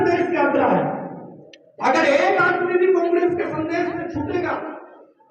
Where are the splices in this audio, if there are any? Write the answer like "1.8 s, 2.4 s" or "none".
none